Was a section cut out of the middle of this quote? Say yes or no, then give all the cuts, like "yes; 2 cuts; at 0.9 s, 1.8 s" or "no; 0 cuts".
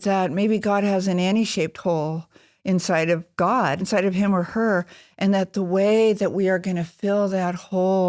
yes; 1 cut; at 3.8 s